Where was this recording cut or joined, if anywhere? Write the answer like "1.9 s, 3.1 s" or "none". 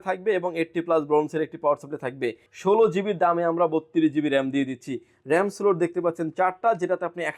2.5 s